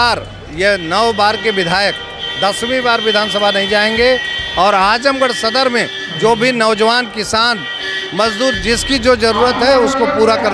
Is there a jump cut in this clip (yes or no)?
no